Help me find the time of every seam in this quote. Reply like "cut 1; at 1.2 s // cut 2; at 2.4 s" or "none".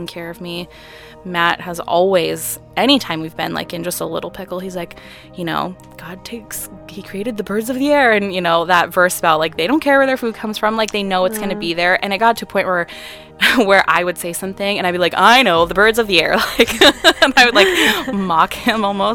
none